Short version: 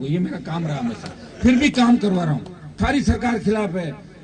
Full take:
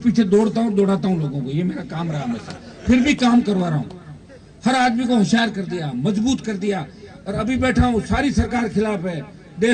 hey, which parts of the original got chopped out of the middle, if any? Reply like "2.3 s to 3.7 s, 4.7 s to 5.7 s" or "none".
4.2 s to 8.1 s